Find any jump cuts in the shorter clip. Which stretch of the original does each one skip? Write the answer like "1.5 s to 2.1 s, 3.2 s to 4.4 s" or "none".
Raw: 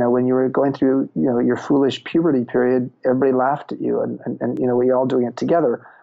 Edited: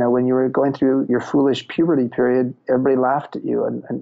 1.1 s to 1.4 s